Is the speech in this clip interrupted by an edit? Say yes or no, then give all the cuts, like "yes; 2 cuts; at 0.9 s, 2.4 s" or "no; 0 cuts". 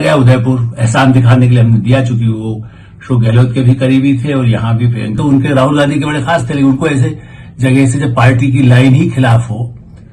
yes; 1 cut; at 5.2 s